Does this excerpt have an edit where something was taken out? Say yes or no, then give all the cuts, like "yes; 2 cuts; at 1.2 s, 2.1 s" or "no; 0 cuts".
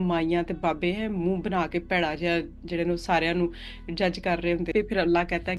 yes; 1 cut; at 4.7 s